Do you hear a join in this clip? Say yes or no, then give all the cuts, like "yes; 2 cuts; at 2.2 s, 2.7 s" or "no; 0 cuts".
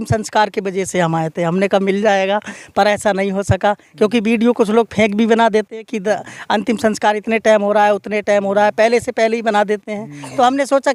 no; 0 cuts